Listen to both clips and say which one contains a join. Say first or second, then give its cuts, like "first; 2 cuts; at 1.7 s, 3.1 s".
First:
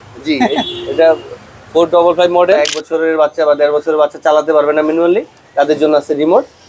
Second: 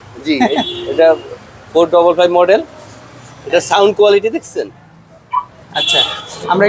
first; 1 cut; at 2.6 s